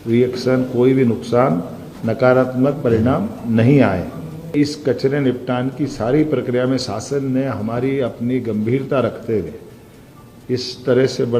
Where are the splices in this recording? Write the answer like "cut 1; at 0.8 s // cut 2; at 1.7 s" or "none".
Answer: cut 1; at 4.5 s